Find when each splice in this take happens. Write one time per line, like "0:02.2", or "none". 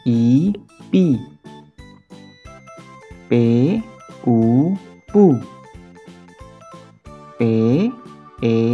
none